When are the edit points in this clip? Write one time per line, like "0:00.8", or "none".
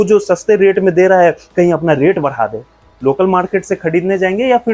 0:02.7

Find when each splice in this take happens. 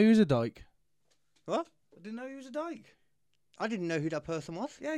none

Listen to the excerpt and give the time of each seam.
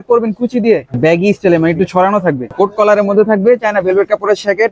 0:01.0
0:02.5

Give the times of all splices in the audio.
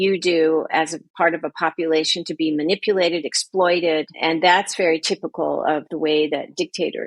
none

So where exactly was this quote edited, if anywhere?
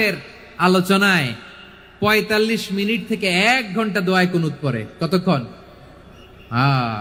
none

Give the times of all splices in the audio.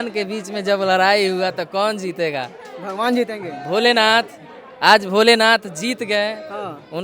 none

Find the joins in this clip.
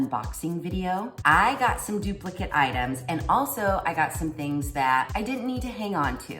0:01.1

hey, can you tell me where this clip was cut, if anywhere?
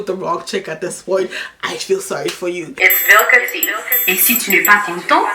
0:02.7

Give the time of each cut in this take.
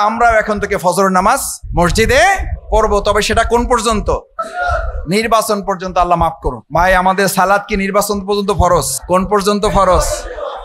0:01.6
0:02.5
0:04.4
0:06.6
0:09.0

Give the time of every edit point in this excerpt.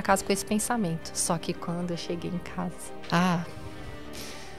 0:02.9

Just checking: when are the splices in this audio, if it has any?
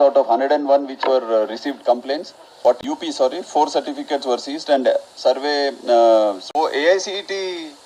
0:02.8
0:06.4

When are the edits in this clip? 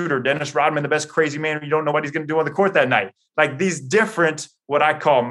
0:01.9

